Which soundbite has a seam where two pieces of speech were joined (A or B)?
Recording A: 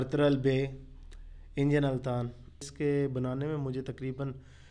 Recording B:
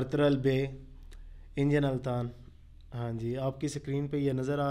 A